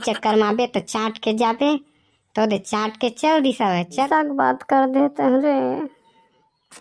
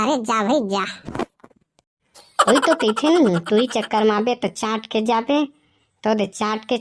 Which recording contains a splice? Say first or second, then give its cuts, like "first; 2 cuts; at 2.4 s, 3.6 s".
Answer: first; 1 cut; at 4.1 s